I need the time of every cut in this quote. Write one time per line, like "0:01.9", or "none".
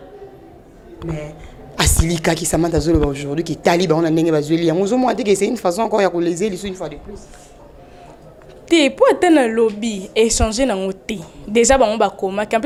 none